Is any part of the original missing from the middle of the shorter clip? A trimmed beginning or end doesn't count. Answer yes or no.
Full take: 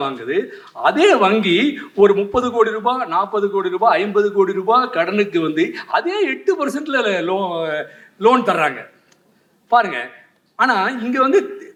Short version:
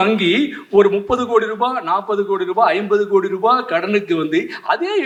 no